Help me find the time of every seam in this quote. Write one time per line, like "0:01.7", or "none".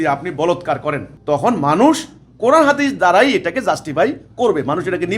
0:01.1